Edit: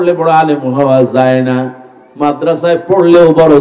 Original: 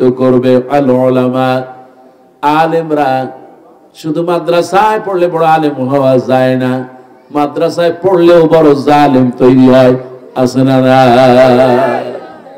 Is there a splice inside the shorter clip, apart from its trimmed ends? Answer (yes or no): no